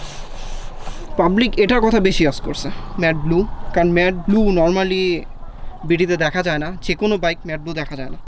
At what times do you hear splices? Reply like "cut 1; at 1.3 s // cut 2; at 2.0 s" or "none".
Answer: none